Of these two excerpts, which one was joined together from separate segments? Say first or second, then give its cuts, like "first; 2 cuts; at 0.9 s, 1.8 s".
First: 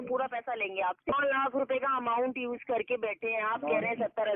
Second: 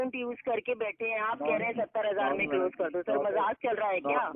first; 1 cut; at 1.1 s